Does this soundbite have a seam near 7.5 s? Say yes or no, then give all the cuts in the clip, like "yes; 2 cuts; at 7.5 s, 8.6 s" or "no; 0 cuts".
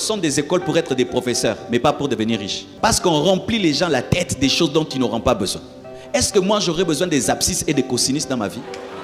no; 1 cut; at 2.6 s